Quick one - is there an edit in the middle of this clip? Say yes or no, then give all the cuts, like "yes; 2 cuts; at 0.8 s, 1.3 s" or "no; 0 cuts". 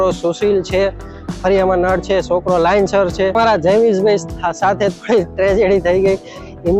yes; 1 cut; at 3.4 s